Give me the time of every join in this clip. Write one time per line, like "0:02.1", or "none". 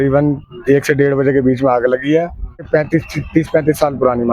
0:02.7